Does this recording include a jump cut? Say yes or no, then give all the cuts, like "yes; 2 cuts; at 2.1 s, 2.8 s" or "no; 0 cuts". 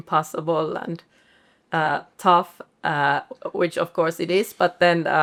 no; 0 cuts